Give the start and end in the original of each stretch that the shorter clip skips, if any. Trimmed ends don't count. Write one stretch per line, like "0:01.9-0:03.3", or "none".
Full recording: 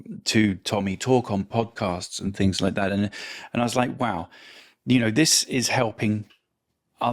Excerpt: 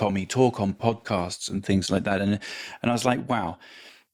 none